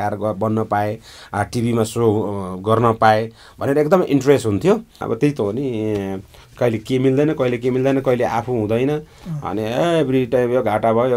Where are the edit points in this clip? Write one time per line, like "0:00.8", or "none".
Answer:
0:05.0